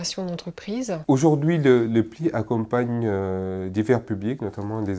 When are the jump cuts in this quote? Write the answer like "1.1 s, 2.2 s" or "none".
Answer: 1.0 s